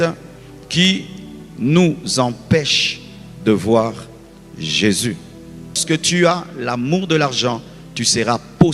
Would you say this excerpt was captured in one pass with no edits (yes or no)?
no